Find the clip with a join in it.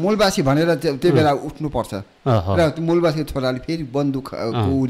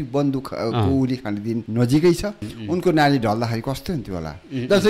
second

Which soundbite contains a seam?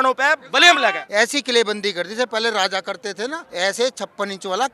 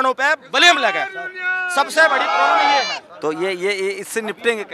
first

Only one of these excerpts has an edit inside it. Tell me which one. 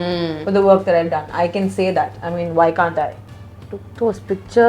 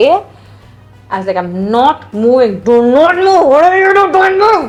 first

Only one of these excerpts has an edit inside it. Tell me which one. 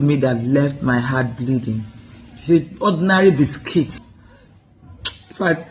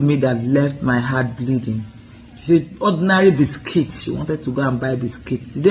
first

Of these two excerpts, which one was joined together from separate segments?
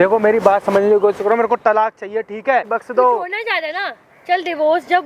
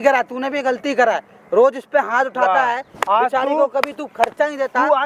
first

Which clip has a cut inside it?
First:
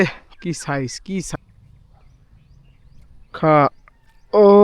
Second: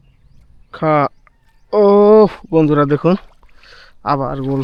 first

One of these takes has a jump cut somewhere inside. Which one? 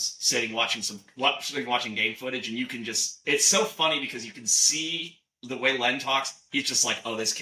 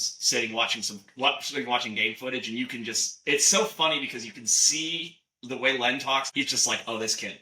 second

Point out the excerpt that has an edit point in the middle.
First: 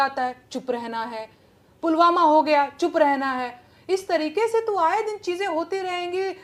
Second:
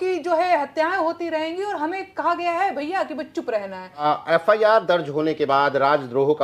second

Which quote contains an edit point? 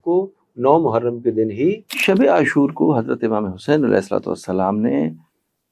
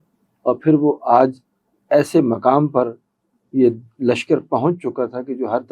first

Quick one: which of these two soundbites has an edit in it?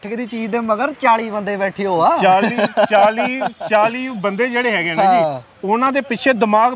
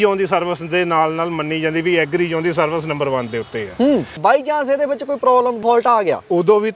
second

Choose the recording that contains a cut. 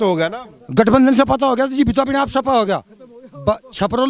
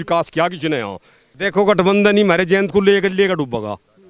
second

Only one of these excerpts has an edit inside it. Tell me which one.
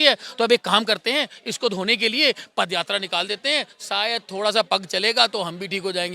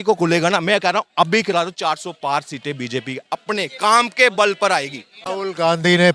second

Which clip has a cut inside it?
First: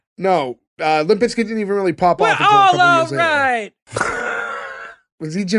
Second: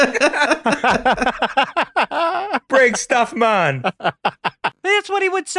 second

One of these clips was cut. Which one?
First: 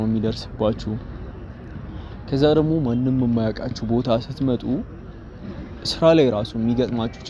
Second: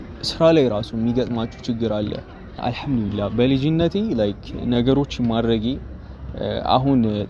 second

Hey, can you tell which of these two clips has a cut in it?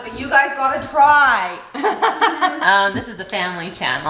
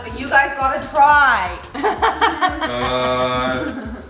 first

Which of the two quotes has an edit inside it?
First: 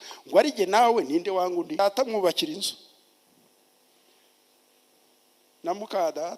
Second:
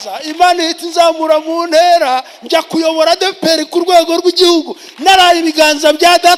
first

